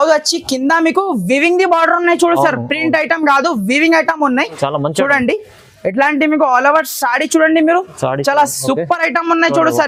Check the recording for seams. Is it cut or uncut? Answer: uncut